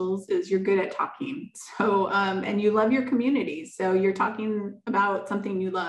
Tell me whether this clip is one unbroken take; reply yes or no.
yes